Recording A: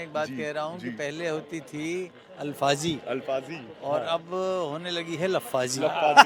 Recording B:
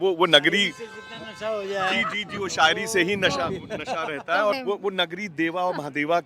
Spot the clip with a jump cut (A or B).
B